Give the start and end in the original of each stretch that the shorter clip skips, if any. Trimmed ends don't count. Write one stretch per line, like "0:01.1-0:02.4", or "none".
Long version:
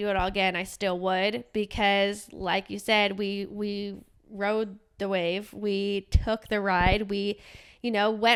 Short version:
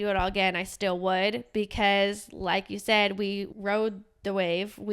0:03.5-0:04.3